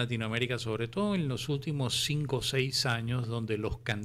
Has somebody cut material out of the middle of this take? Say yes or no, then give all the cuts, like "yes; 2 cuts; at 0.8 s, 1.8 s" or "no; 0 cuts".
no; 0 cuts